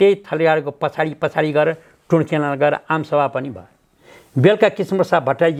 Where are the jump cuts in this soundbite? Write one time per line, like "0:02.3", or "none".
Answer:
none